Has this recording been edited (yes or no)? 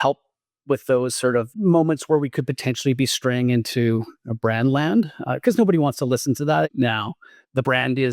yes